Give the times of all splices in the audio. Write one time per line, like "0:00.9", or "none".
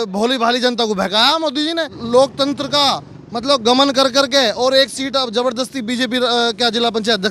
0:01.9

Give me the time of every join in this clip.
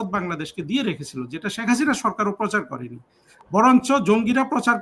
none

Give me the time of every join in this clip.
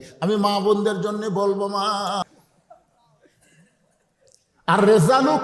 0:02.2

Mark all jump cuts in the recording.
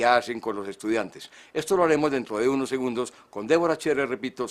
0:02.7

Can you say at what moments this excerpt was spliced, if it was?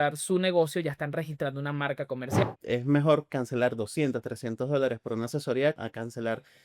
0:02.4
0:05.8

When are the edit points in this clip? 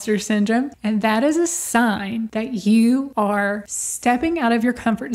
0:02.3
0:03.3

